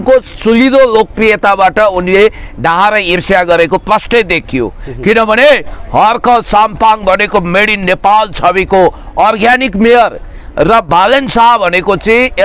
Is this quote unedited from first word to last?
yes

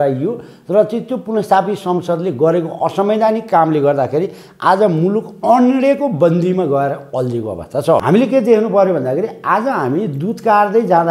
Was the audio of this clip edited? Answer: yes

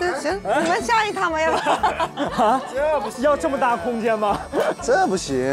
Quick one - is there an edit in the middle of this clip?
no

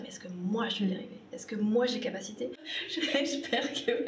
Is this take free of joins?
no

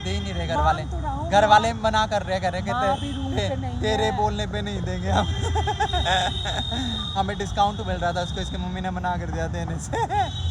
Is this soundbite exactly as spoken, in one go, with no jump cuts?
yes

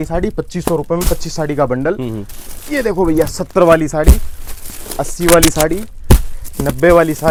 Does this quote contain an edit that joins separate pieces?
no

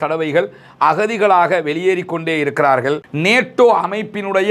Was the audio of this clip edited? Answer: yes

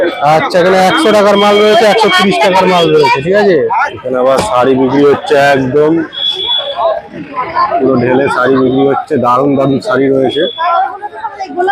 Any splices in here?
yes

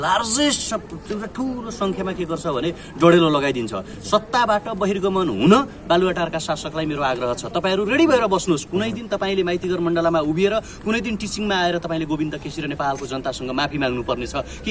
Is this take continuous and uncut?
yes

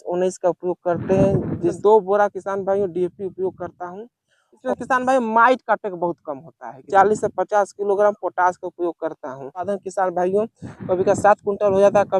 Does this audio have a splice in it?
yes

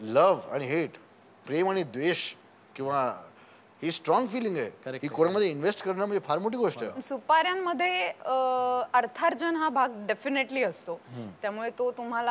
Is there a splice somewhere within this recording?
yes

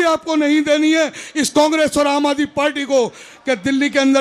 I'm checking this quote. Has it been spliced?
yes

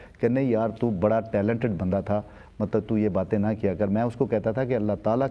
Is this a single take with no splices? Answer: yes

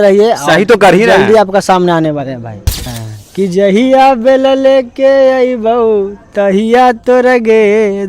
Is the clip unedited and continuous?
no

